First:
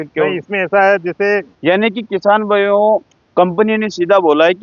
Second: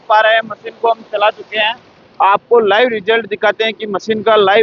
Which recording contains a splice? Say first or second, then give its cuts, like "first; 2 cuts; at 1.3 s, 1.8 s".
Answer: first; 1 cut; at 1.5 s